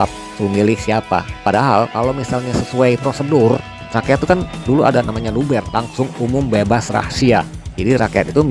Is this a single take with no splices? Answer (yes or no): yes